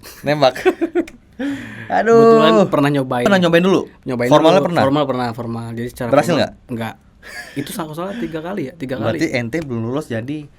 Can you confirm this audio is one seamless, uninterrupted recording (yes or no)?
no